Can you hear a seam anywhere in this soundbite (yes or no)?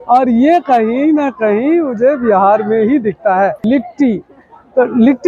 yes